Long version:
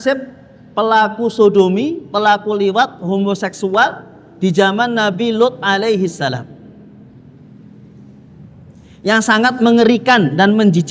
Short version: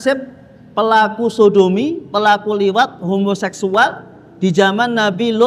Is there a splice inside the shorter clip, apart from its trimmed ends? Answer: no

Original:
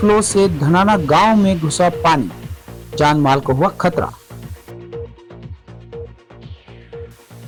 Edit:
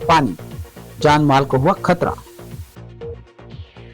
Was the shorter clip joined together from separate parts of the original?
yes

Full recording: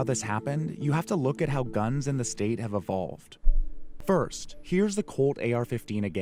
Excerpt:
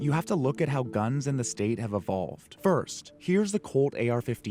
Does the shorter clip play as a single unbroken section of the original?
no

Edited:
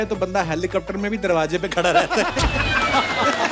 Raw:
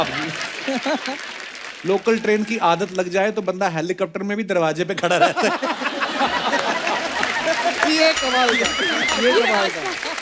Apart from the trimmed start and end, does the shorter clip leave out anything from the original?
no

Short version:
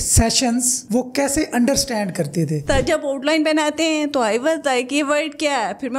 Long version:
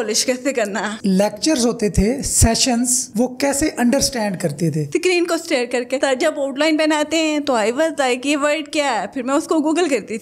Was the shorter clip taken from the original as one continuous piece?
no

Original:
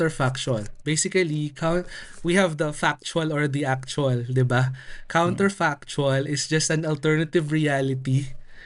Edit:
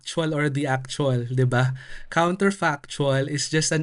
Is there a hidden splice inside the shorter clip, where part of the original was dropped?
no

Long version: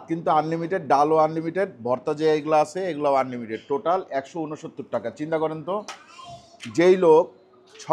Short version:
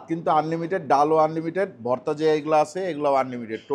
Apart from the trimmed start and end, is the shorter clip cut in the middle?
no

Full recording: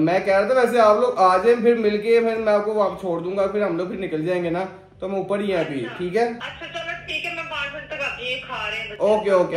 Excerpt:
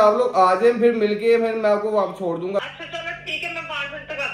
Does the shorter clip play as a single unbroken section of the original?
no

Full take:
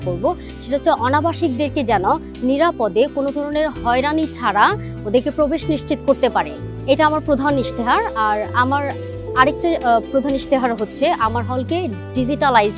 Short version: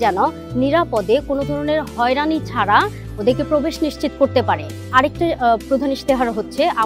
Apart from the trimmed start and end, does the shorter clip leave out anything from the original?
yes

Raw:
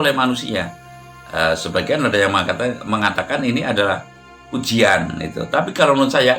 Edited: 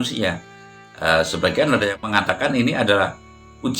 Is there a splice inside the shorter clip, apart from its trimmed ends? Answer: yes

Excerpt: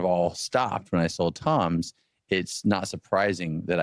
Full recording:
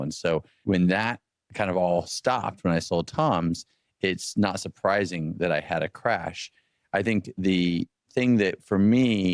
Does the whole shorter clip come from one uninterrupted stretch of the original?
yes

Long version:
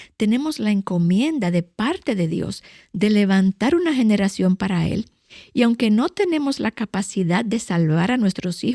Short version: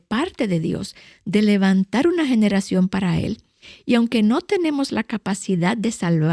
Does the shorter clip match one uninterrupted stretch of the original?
yes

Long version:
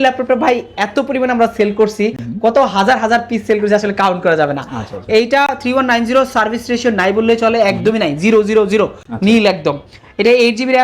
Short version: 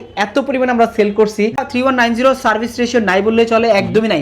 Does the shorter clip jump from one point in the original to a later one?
yes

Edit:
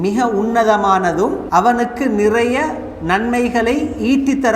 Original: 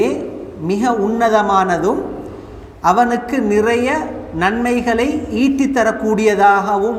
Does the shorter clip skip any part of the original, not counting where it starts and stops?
yes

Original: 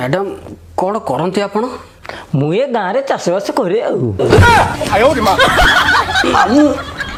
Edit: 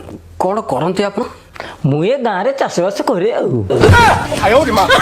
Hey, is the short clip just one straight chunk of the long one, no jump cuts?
no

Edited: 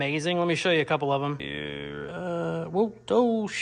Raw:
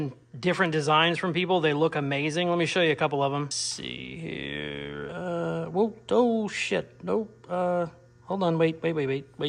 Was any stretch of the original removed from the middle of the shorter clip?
yes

